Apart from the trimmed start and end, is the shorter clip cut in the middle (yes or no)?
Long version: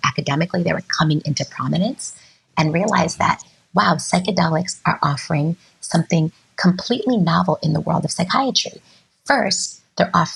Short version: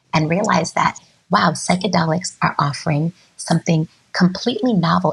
no